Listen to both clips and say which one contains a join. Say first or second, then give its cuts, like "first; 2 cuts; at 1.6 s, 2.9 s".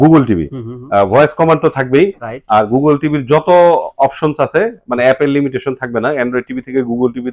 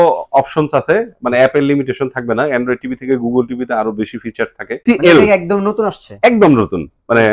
second; 1 cut; at 4.8 s